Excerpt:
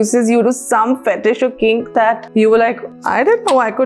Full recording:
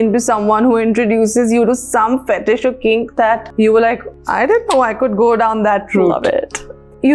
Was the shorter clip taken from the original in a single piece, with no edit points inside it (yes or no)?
yes